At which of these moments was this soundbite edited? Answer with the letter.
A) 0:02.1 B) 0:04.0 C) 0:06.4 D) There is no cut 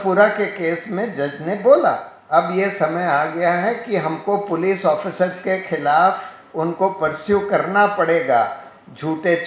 A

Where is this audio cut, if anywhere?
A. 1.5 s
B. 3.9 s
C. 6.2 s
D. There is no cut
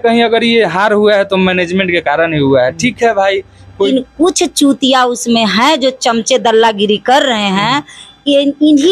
B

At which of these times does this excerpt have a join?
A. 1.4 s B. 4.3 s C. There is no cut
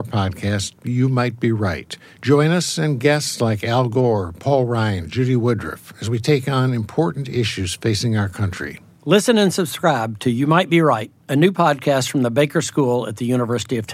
C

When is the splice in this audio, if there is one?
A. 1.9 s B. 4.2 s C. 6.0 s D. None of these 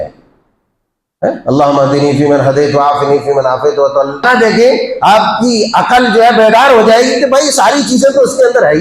B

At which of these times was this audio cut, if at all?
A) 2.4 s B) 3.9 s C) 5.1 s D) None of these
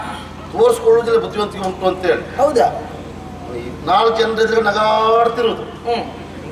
D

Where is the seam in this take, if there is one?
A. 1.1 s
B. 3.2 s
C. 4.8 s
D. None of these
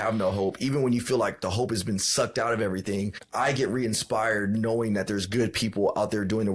B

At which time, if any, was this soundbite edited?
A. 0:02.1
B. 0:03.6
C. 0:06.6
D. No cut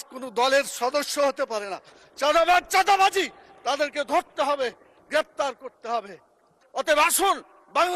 C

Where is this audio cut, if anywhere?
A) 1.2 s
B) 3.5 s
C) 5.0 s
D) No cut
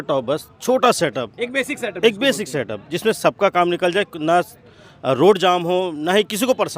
D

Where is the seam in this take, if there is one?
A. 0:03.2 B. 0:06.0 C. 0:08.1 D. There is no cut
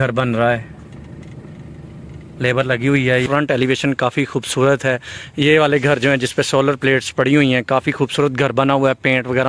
A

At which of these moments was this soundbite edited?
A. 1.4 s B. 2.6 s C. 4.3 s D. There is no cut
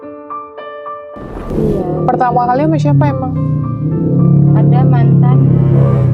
A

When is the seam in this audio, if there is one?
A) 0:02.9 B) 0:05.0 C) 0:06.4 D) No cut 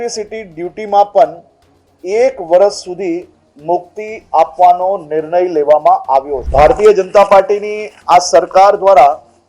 C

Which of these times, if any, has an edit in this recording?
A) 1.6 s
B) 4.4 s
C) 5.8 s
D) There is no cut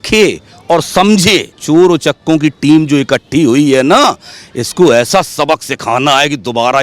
A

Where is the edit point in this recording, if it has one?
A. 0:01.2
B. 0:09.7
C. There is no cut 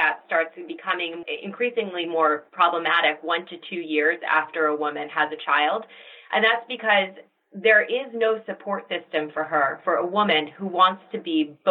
A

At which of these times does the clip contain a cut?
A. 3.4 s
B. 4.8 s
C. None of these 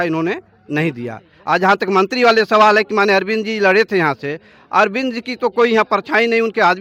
C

